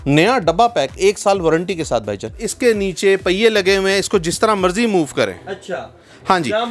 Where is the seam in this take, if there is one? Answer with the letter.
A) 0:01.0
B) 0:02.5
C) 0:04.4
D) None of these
B